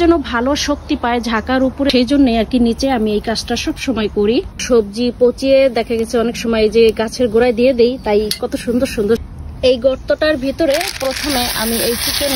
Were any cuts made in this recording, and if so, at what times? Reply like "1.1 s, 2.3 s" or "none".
4.6 s, 9.2 s

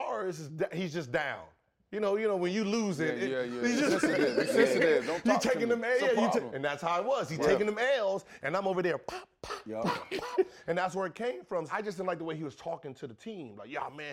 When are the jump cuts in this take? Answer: 11.7 s

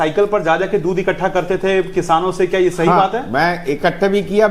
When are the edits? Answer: none

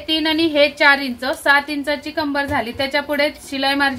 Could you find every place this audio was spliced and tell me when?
none

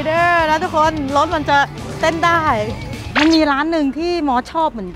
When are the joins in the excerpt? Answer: 3.0 s

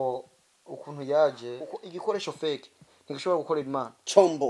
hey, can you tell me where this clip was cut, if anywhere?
1.7 s

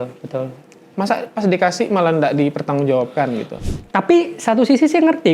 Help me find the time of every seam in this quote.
3.6 s

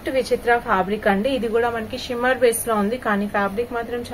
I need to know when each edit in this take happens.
none

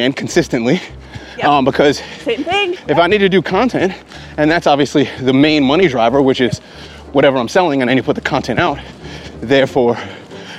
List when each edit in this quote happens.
2.8 s

